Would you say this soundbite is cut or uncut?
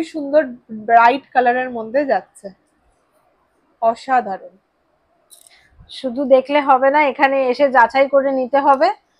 uncut